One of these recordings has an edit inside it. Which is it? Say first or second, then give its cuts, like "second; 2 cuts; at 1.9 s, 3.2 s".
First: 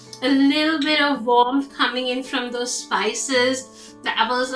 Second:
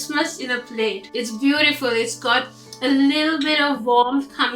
second; 1 cut; at 1.0 s